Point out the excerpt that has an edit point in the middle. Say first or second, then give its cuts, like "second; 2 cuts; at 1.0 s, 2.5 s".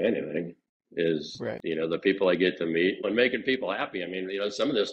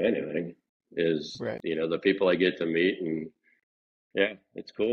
first; 1 cut; at 3.0 s